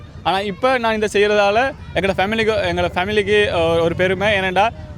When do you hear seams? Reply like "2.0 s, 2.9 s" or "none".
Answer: none